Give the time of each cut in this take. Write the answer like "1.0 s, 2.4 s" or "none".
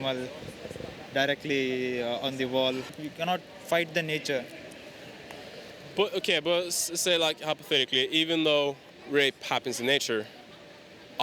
3.0 s, 8.9 s